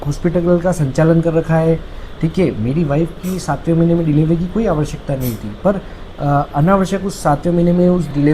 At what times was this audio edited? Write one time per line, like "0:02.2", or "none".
none